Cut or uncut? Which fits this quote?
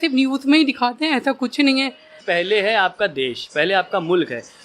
cut